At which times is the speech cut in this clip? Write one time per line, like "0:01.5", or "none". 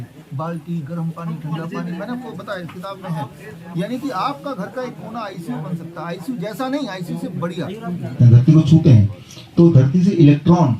0:08.2